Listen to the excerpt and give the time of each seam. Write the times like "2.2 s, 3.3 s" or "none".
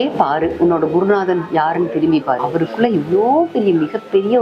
2.4 s